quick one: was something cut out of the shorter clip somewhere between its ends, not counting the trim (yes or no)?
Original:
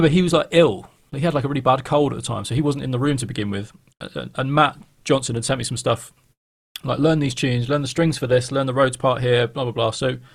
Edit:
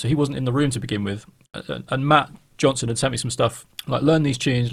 yes